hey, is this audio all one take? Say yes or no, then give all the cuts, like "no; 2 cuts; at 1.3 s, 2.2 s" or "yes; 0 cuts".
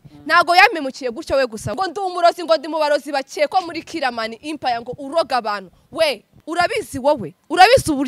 no; 2 cuts; at 1.7 s, 6.3 s